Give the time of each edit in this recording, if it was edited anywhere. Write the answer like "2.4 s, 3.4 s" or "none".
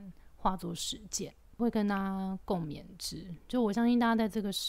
1.5 s